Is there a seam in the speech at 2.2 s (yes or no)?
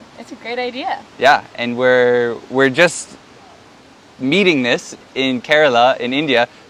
no